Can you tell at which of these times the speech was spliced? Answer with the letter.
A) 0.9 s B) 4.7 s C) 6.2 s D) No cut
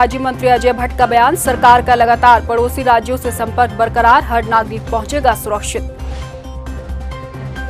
D